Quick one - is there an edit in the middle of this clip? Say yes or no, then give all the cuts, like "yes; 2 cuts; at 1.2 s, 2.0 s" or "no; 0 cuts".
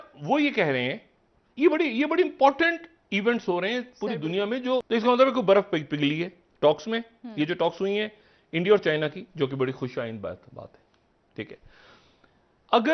yes; 1 cut; at 4.9 s